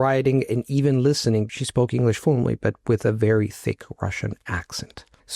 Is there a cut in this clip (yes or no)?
yes